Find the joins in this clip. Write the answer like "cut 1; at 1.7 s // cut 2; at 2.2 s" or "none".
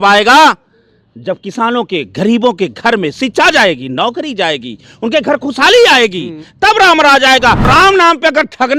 cut 1; at 7.7 s